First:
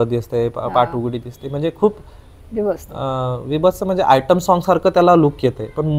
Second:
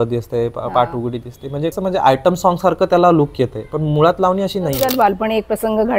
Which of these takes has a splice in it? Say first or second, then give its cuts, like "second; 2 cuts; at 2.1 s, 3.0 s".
second; 2 cuts; at 1.7 s, 4.8 s